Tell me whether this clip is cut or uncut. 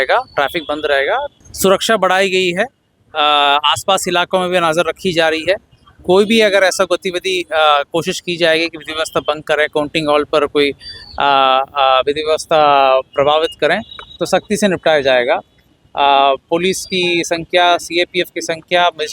cut